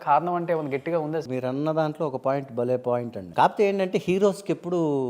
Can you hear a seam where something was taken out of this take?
yes; 2 cuts; at 1.2 s, 3.2 s

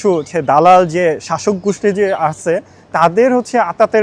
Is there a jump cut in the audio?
no; 0 cuts

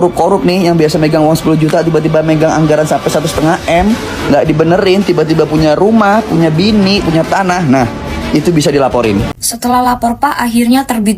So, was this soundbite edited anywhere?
yes; 1 cut; at 9.3 s

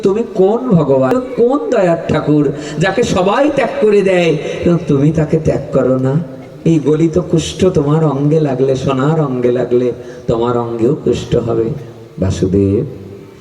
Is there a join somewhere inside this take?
yes; 1 cut; at 1.1 s

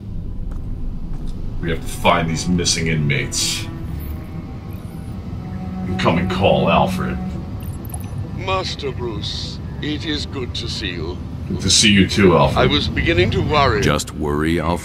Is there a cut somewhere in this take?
no; 0 cuts

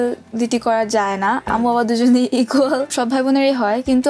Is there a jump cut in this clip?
yes; 2 cuts; at 1.4 s, 2.9 s

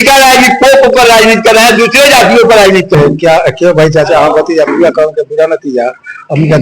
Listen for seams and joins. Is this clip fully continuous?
no; 1 cut; at 2.9 s

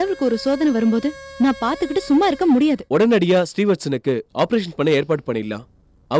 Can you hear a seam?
yes; 1 cut; at 2.8 s

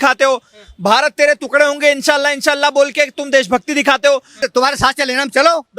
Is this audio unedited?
no; 1 cut; at 4.5 s

